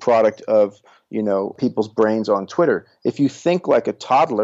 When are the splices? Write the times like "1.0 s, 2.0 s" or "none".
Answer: 1.6 s